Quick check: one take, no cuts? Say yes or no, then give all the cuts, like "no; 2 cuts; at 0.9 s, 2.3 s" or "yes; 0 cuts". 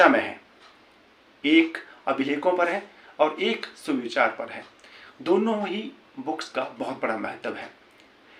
yes; 0 cuts